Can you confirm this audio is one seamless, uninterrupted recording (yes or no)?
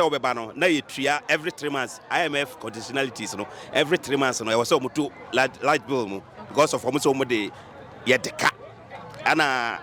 yes